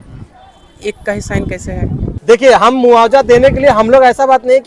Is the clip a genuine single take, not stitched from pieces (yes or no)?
no